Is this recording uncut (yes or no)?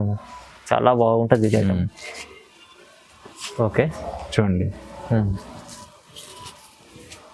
yes